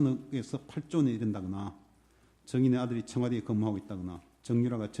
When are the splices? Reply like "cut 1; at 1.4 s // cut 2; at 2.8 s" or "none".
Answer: cut 1; at 3.1 s